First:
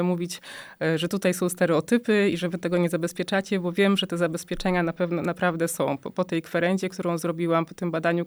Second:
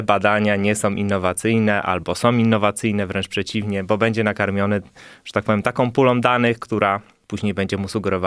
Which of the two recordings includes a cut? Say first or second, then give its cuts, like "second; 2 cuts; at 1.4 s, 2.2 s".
second; 1 cut; at 7.2 s